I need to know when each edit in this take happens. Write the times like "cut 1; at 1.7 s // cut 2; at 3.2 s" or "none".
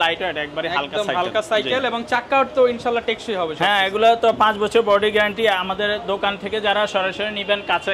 none